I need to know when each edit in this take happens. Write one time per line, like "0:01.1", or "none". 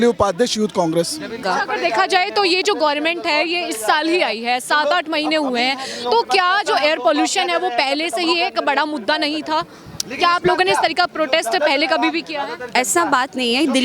0:01.4